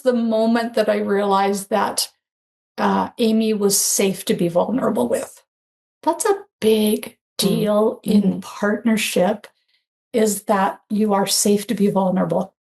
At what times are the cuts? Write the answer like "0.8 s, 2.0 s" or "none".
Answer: none